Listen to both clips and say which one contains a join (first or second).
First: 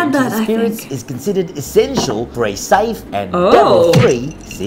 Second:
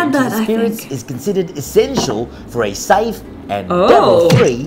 first